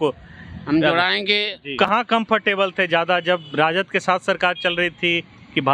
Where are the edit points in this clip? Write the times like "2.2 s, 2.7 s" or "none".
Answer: 1.7 s